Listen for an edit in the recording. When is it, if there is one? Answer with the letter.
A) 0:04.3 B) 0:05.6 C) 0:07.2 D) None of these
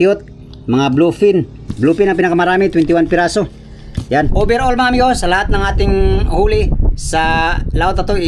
A